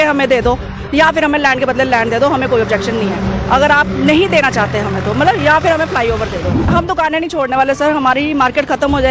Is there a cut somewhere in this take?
yes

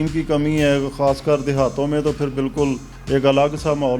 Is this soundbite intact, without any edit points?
no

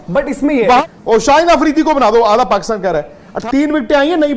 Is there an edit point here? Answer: yes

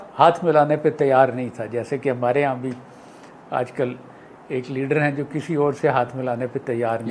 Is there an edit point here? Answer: no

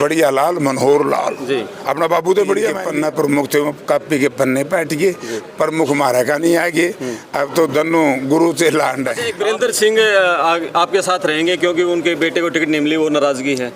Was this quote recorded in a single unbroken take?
no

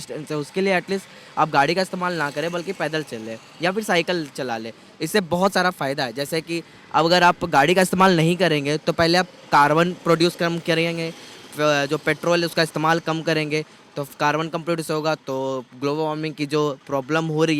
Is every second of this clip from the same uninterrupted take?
yes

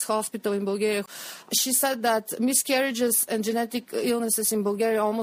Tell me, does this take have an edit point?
yes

